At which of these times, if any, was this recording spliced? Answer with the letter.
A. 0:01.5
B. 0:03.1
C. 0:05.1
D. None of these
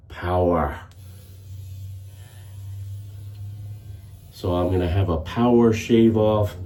D